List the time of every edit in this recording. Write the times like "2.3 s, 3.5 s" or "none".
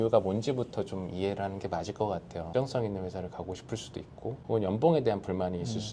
2.5 s